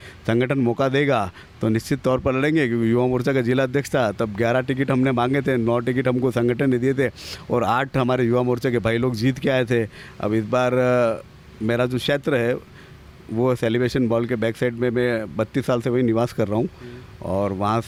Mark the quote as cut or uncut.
uncut